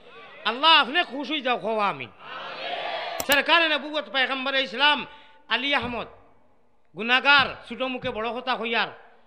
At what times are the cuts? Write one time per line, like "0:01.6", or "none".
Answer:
0:03.1